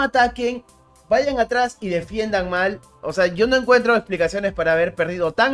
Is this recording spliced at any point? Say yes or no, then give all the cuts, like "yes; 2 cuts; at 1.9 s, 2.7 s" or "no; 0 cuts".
no; 0 cuts